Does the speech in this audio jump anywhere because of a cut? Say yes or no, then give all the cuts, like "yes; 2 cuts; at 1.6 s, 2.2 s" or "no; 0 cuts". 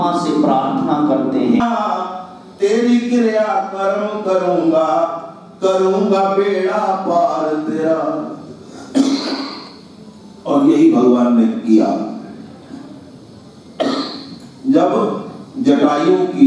yes; 1 cut; at 1.6 s